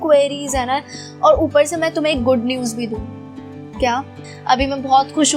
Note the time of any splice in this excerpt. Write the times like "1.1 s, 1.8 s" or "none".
4.3 s

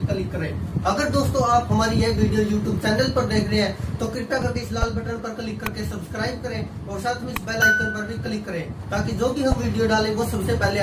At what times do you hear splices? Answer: none

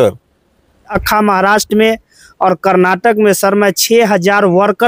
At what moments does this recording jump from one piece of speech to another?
1.0 s

